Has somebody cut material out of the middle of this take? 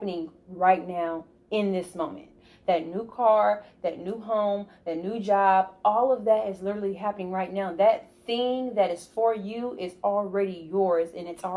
no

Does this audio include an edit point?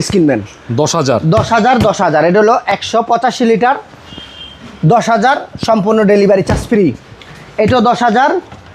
no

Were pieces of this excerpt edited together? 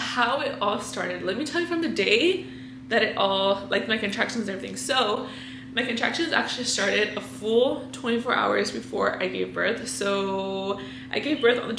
no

